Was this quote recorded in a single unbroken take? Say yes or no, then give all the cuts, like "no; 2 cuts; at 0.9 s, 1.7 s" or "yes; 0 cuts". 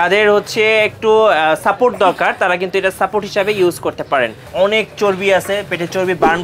no; 1 cut; at 4.4 s